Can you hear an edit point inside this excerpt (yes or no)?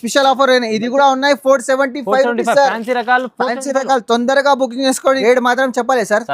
yes